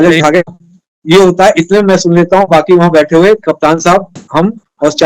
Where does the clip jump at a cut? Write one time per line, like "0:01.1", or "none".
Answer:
none